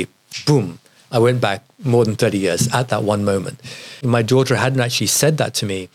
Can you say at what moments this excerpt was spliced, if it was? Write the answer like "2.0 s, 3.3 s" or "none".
4.1 s